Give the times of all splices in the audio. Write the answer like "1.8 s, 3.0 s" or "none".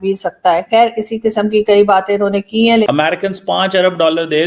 2.9 s